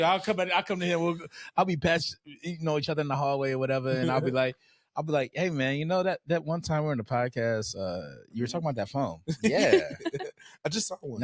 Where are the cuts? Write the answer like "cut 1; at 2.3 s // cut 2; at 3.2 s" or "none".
none